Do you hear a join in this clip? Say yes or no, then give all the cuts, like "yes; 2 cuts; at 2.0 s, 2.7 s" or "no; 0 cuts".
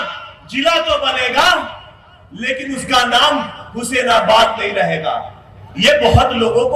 no; 0 cuts